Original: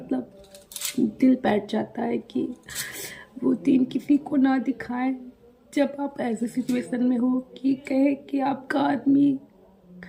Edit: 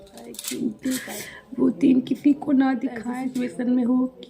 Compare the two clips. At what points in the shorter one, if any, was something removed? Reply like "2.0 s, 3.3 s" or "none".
1.1 s, 3.1 s